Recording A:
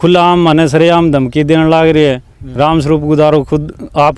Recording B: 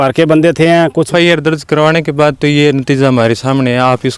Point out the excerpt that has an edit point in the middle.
B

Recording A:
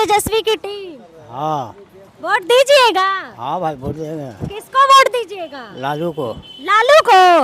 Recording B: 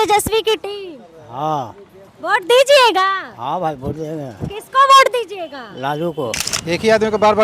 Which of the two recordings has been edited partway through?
B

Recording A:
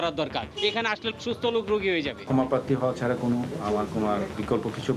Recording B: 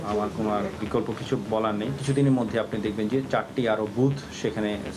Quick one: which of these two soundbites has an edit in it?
A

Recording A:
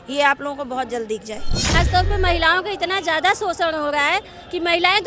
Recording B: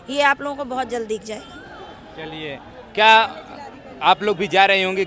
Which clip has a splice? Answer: A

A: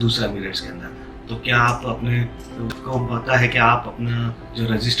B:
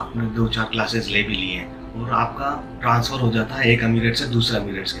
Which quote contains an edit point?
A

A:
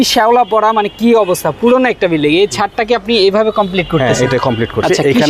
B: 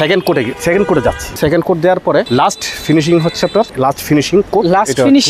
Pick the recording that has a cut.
B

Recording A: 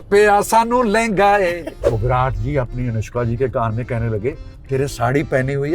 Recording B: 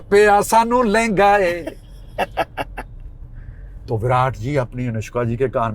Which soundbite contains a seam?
A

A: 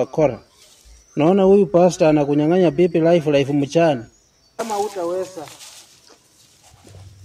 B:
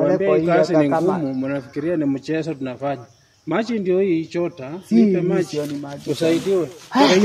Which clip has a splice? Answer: A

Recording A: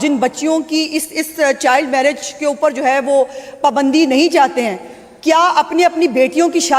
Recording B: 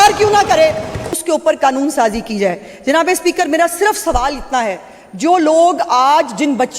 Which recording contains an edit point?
B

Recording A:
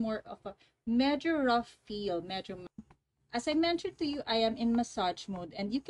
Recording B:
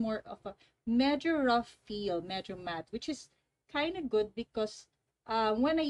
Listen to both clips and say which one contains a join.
A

